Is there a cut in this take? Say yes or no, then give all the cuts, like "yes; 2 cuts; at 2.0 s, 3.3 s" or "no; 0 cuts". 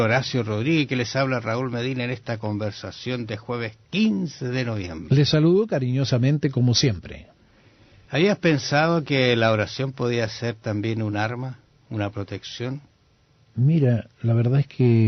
yes; 1 cut; at 11.8 s